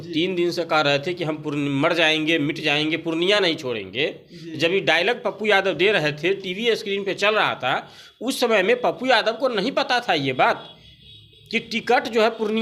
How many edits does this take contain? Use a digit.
0